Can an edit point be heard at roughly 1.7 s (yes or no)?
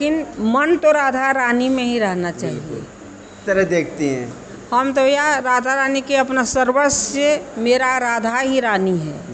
no